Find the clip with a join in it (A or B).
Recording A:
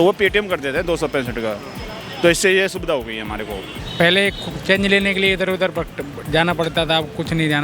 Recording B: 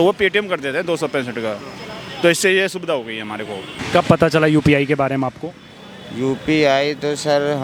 A